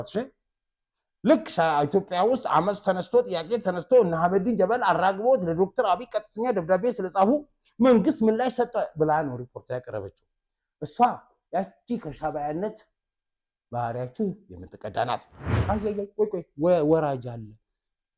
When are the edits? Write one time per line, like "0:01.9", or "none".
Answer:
0:15.5

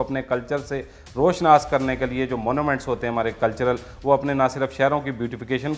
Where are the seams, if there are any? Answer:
none

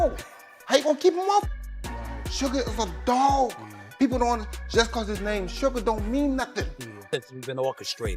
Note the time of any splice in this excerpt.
0:06.9

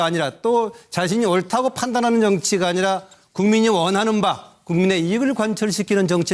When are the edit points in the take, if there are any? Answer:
none

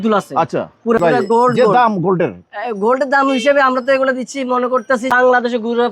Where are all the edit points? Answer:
0:01.2
0:05.1

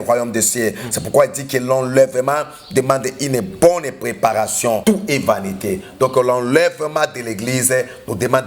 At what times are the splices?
0:04.8

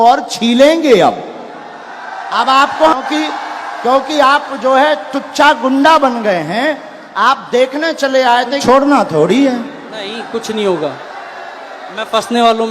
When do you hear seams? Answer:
0:03.0
0:08.6

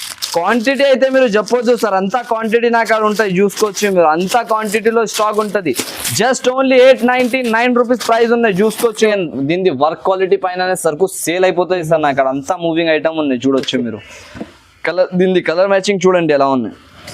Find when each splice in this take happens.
0:09.0

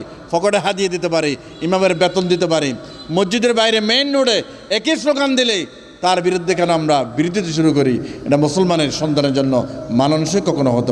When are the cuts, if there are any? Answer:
none

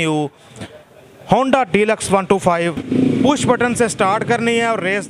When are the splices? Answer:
0:02.8

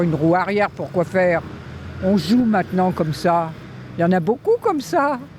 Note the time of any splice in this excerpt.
none

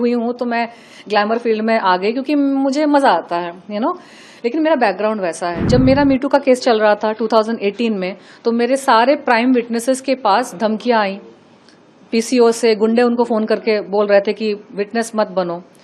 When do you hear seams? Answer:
0:05.6

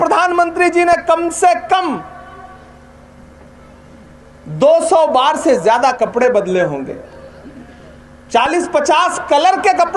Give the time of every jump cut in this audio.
none

